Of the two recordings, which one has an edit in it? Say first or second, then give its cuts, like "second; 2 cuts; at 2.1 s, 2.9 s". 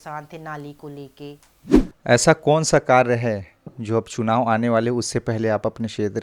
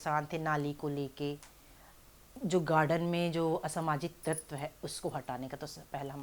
first; 1 cut; at 1.6 s